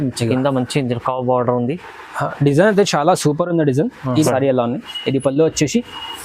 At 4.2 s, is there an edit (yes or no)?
yes